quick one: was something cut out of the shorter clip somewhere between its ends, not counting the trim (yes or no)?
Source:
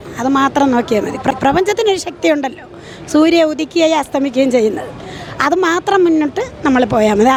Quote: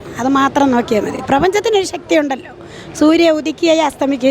yes